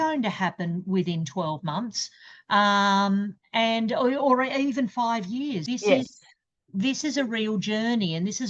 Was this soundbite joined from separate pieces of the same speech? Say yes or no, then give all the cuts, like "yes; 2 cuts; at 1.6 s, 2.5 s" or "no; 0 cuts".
no; 0 cuts